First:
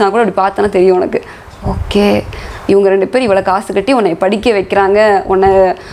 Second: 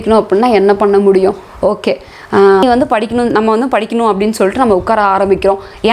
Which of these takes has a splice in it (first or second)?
second